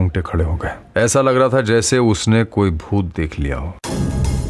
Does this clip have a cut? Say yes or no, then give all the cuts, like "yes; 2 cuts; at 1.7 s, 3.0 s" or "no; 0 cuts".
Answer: no; 0 cuts